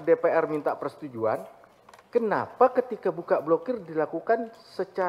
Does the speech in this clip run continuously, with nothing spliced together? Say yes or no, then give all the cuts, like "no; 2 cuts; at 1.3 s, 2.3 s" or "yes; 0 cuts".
yes; 0 cuts